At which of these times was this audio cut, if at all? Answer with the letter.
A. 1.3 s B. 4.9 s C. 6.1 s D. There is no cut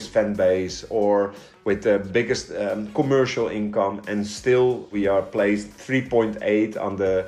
B